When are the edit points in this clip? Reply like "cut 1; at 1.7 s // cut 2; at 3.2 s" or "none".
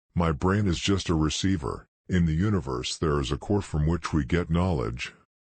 cut 1; at 4.4 s

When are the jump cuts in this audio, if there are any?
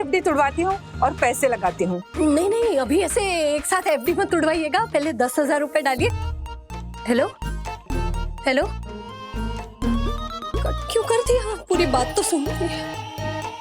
cut 1; at 2.0 s // cut 2; at 12.7 s

